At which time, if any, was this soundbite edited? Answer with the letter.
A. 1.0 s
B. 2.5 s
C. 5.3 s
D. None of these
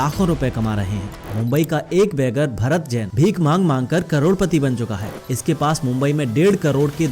A